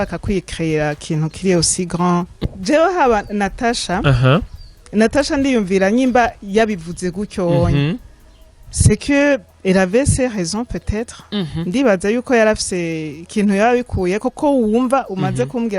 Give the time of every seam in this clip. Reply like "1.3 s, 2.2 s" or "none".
2.3 s

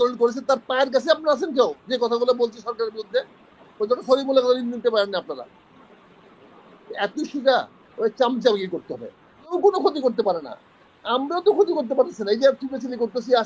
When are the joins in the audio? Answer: 9.5 s

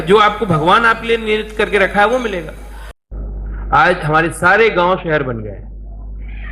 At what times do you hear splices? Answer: 2.8 s

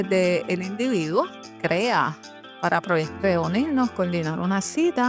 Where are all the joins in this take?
1.5 s, 3.1 s

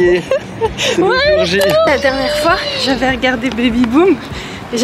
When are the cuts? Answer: 1.9 s

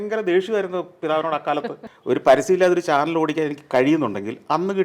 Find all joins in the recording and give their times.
1.8 s

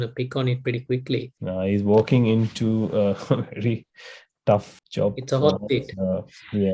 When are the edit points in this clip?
1.4 s, 4.7 s

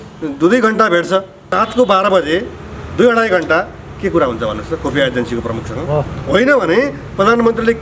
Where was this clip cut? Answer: 1.6 s, 6.2 s

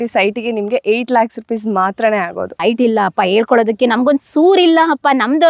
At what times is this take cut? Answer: 2.6 s

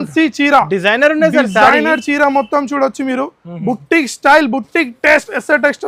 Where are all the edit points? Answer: none

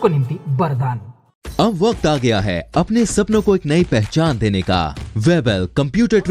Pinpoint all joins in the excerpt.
5.0 s

